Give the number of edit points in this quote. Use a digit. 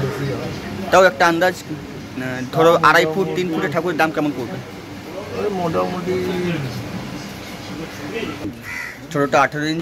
1